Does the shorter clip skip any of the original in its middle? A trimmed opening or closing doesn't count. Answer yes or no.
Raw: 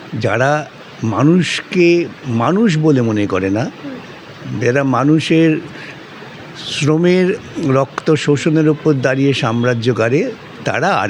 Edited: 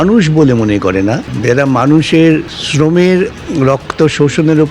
yes